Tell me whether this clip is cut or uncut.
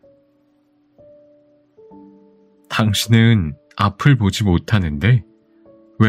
uncut